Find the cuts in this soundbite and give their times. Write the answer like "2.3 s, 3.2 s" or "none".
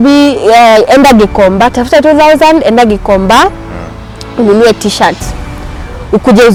none

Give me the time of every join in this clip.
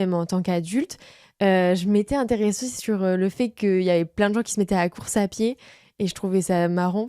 none

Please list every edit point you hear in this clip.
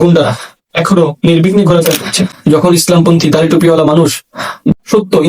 2.3 s

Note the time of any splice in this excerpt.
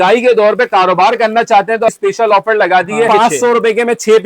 1.9 s, 3.1 s

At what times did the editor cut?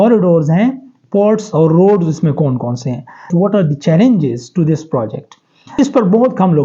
3.3 s, 5.8 s

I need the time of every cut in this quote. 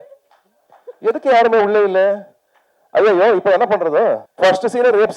4.3 s

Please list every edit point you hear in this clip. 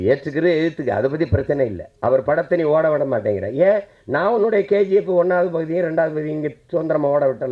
none

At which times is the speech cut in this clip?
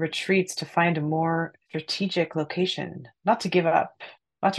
1.6 s

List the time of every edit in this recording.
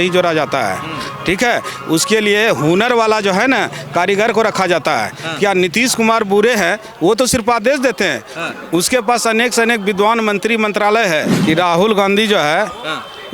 11.3 s

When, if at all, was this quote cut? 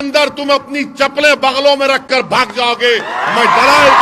none

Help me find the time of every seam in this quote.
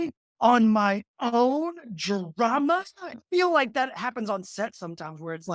3.0 s

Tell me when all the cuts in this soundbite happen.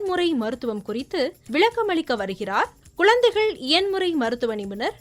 1.4 s, 2.8 s

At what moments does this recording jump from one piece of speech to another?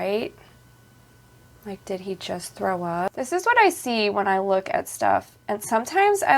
3.1 s

